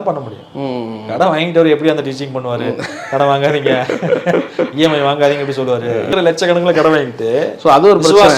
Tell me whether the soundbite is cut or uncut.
cut